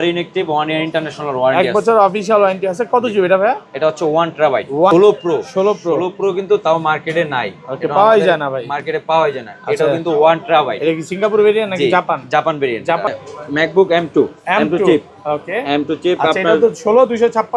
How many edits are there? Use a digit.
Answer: 2